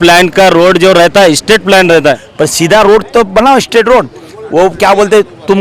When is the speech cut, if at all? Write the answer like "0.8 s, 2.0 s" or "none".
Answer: 2.3 s